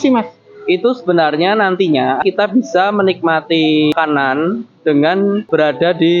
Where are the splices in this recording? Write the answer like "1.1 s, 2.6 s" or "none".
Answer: 2.2 s, 3.9 s, 5.4 s